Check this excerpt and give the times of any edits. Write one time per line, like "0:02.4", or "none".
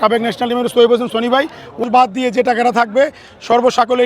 0:01.8